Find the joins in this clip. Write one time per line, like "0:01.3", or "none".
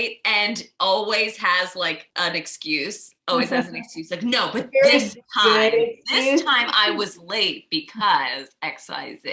0:02.0